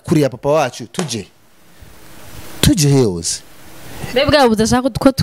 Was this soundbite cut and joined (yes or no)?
no